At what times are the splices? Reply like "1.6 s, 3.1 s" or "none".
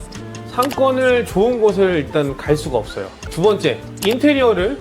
3.2 s